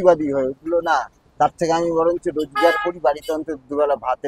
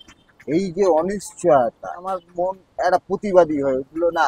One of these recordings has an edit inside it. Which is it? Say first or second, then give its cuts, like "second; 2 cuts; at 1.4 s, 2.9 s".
second; 1 cut; at 2.3 s